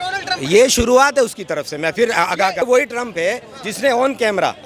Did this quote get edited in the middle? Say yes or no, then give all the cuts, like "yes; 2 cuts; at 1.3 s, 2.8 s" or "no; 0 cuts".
yes; 1 cut; at 2.6 s